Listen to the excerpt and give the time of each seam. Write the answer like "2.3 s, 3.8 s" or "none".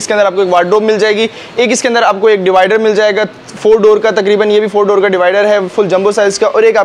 none